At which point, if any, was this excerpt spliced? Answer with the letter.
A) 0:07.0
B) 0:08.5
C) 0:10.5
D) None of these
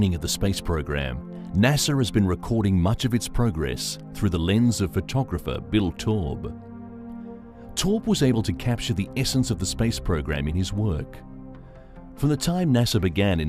B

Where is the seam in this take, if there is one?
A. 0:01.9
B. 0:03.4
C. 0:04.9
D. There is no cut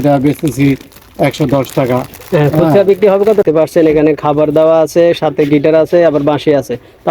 B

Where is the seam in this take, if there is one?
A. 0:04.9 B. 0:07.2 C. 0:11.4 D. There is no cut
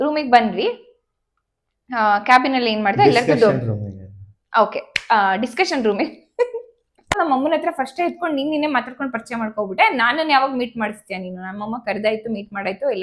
B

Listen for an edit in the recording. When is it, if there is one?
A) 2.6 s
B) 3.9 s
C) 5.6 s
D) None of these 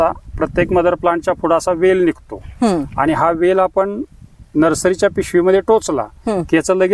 D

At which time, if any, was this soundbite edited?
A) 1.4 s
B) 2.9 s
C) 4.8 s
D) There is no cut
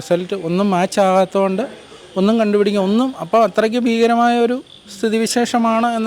D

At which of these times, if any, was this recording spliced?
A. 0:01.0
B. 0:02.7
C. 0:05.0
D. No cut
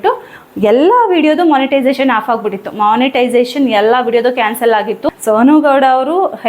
C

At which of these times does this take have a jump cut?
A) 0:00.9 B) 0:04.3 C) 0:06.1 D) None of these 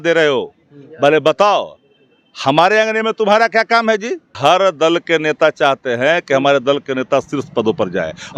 B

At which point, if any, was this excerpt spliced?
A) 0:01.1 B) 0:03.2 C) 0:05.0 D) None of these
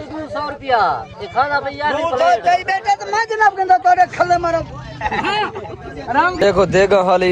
D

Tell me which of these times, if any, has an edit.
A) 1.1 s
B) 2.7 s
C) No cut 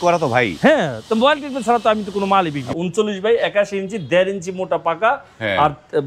B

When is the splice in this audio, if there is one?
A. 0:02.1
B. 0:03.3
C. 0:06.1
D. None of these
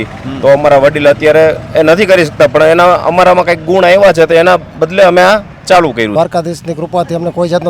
C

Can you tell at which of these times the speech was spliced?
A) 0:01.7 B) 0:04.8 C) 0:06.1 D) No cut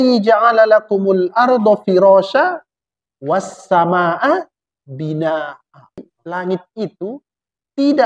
C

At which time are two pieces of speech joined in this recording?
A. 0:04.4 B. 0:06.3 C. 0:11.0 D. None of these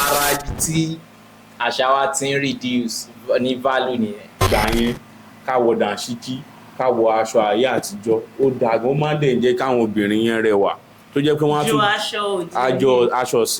A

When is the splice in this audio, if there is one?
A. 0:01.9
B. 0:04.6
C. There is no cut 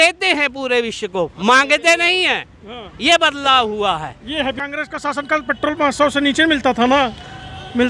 B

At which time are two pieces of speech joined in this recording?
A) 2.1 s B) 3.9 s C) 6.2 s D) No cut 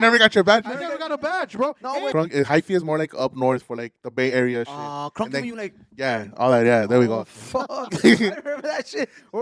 A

